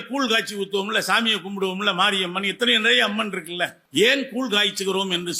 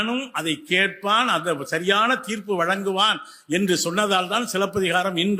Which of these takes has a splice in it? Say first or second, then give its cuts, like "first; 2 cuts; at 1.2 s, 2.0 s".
first; 1 cut; at 3.8 s